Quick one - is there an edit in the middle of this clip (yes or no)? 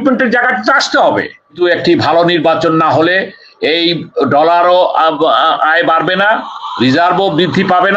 yes